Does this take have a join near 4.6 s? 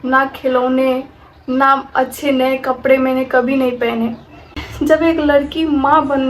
yes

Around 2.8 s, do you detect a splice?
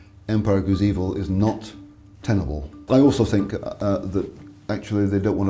yes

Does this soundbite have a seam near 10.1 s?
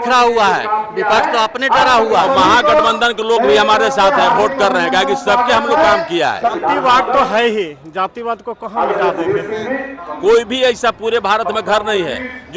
yes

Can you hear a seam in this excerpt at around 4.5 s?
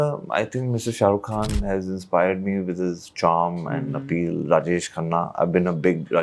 no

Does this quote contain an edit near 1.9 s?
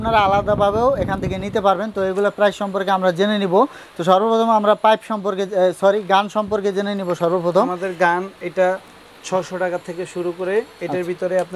no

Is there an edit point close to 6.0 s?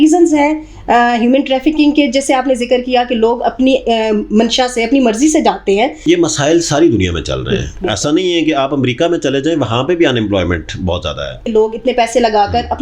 yes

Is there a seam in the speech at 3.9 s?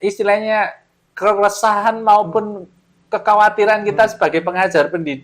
no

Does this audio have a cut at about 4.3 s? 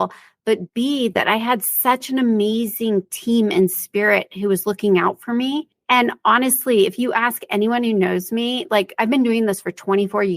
no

